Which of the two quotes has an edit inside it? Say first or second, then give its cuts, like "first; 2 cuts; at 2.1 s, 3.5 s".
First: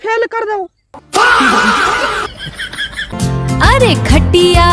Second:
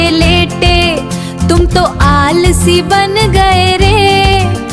first; 1 cut; at 3.1 s